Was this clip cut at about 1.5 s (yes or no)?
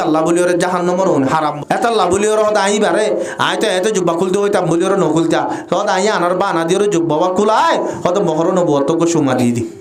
yes